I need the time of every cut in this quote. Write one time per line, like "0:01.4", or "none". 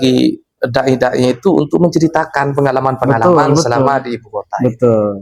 none